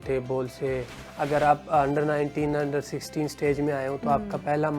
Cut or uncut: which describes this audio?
cut